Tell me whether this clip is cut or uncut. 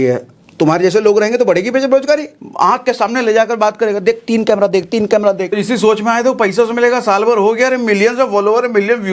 cut